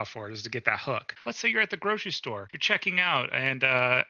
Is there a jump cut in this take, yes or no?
yes